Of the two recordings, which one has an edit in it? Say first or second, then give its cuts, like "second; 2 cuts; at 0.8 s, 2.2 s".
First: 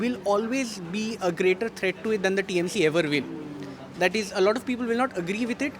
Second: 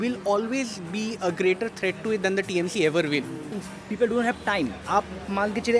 second; 1 cut; at 3.7 s